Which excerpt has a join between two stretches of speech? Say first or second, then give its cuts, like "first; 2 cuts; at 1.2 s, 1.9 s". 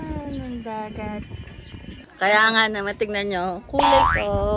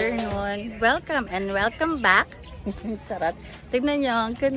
first; 1 cut; at 1.9 s